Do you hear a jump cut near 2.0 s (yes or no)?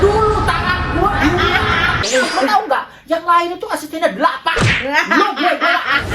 yes